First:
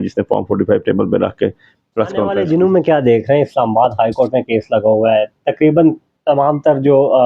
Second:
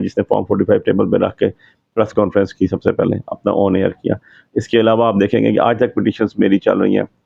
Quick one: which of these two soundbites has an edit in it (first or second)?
first